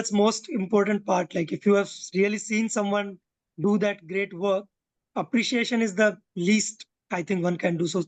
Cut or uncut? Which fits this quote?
uncut